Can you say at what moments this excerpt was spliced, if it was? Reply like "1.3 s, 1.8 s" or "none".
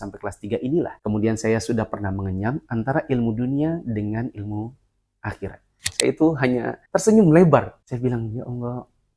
5.8 s